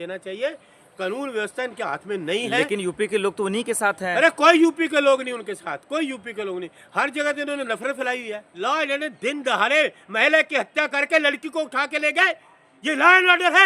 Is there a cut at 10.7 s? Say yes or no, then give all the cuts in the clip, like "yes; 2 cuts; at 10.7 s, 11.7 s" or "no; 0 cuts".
no; 1 cut; at 8.4 s